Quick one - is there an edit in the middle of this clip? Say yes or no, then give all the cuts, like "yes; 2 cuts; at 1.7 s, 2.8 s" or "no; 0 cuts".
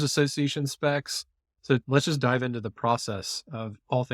yes; 1 cut; at 1.8 s